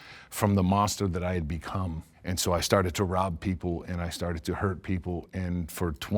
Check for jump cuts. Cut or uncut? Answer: cut